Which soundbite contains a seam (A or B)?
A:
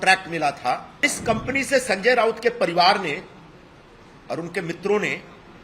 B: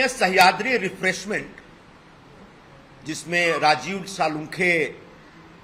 A